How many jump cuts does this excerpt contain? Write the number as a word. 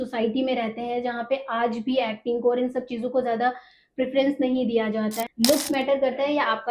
one